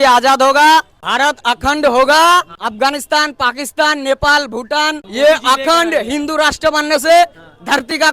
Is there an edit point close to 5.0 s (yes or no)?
yes